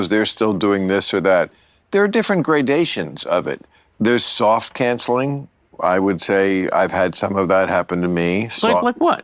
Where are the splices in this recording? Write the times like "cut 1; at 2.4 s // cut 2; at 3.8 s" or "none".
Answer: cut 1; at 5.0 s